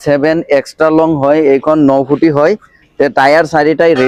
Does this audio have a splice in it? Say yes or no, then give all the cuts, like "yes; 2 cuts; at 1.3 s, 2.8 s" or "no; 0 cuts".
no; 0 cuts